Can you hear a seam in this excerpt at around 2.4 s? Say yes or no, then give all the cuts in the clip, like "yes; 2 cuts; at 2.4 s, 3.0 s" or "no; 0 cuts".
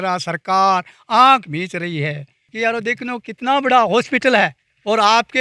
yes; 1 cut; at 2.4 s